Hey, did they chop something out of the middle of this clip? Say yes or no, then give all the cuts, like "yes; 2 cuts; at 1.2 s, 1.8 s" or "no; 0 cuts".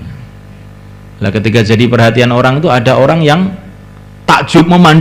no; 0 cuts